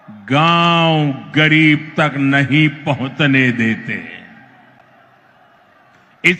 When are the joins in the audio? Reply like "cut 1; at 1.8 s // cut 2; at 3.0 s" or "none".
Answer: none